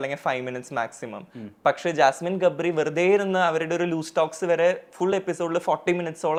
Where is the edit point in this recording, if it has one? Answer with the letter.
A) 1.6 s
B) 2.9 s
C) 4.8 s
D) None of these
D